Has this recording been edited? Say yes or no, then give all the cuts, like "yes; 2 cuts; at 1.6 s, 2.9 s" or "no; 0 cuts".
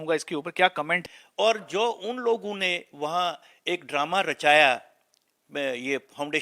yes; 1 cut; at 1.0 s